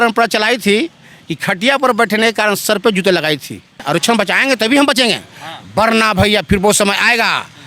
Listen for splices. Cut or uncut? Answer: cut